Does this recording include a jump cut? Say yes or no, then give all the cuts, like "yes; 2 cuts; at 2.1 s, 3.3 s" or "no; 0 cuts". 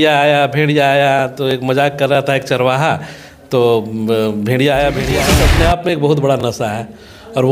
yes; 1 cut; at 5.3 s